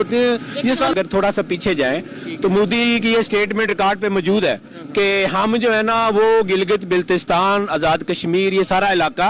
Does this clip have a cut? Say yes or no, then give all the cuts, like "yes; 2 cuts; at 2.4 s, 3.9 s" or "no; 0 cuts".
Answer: yes; 1 cut; at 0.9 s